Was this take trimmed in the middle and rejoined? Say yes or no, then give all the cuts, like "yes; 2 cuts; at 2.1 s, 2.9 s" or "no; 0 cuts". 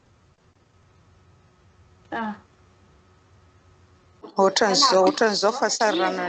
yes; 1 cut; at 4.4 s